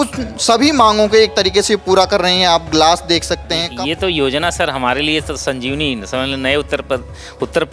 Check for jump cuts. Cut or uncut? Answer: cut